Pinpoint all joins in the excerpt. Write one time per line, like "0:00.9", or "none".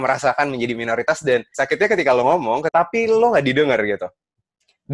0:02.7